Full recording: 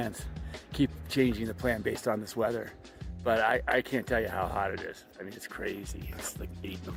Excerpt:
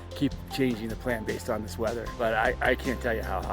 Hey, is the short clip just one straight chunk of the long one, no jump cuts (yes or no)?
no